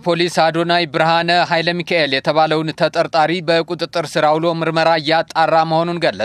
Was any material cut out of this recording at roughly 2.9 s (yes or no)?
no